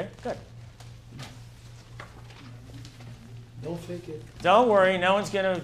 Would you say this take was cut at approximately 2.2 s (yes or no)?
yes